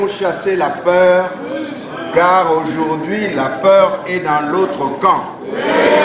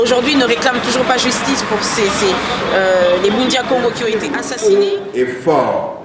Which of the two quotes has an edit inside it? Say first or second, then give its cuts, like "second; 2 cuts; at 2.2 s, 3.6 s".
second; 1 cut; at 4.2 s